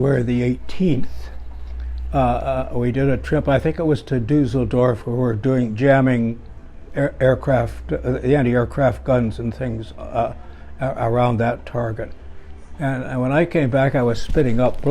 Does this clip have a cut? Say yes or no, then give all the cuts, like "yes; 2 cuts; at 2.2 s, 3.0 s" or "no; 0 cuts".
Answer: no; 0 cuts